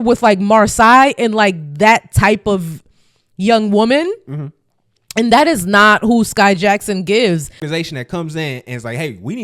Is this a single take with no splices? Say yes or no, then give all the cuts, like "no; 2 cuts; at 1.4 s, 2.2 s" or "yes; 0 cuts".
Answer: no; 1 cut; at 7.7 s